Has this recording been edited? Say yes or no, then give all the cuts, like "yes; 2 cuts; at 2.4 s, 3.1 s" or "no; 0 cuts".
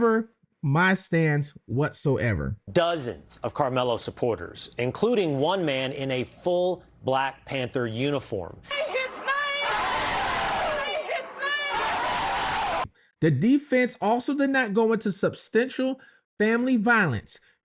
yes; 3 cuts; at 2.5 s, 8.7 s, 13.0 s